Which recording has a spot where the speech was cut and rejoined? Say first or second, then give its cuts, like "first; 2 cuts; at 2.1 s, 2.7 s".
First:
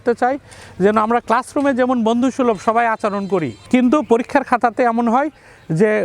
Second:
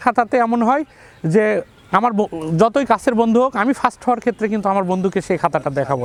first; 1 cut; at 3.6 s